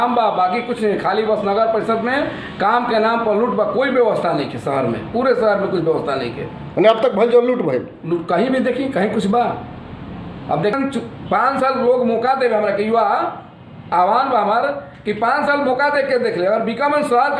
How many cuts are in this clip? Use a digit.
1